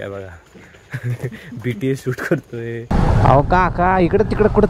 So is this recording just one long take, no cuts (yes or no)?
no